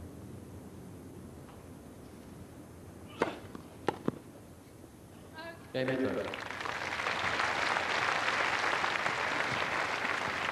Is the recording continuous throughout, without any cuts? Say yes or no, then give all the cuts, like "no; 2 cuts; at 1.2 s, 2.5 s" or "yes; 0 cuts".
yes; 0 cuts